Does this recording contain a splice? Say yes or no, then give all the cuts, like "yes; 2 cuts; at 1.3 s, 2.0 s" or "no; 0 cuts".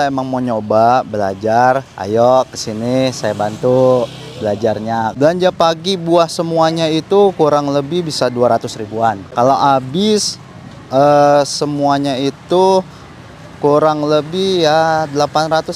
yes; 2 cuts; at 5.1 s, 9.2 s